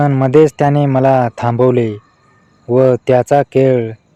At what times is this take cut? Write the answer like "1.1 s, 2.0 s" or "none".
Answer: none